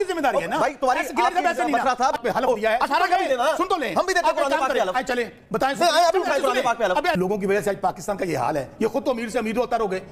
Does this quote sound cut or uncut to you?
cut